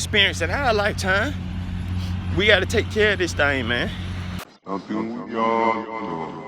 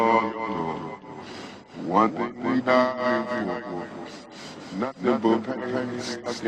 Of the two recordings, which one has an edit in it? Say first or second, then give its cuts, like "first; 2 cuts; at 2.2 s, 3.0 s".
first; 1 cut; at 4.4 s